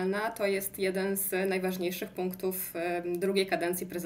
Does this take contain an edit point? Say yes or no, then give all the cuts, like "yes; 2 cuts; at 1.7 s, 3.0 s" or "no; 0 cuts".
no; 0 cuts